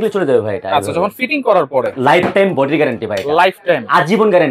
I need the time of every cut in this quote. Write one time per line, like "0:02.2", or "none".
0:01.9